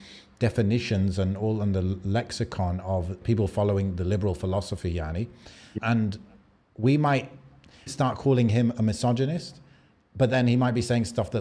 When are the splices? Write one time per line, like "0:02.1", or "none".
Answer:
0:03.2
0:05.7
0:07.9